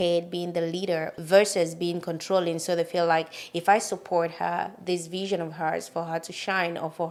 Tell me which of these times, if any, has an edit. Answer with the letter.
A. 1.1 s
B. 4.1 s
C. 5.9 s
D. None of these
D